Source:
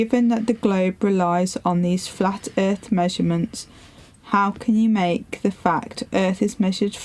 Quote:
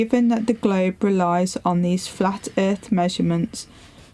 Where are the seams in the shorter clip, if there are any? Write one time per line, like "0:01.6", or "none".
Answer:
none